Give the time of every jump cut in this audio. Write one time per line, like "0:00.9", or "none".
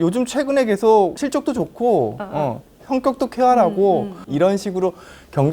0:01.2
0:04.2